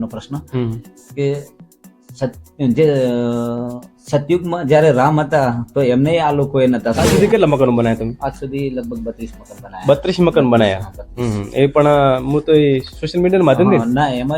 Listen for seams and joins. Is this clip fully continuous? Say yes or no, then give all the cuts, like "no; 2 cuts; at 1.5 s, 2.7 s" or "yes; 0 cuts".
no; 1 cut; at 7.0 s